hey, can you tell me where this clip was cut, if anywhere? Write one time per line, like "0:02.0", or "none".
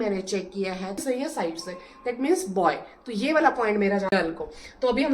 0:01.0
0:04.1